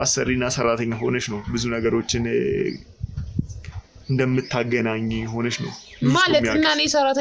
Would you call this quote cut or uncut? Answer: uncut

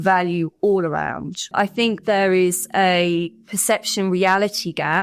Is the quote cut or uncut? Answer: cut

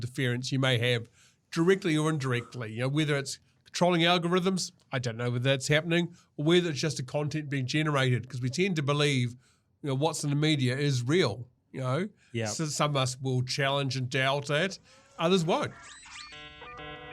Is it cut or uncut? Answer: cut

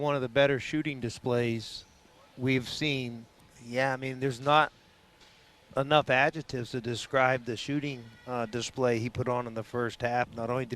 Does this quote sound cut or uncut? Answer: uncut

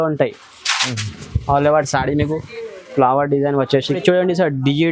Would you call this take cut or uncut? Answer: cut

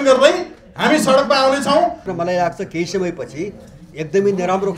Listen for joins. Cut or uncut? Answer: cut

